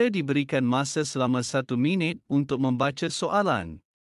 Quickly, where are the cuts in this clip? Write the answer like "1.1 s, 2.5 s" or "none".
3.1 s